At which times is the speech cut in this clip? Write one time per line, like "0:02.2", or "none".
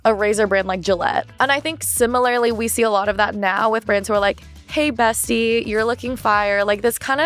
0:01.2